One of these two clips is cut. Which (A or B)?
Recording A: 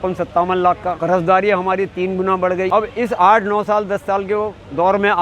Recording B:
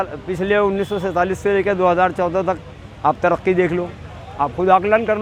A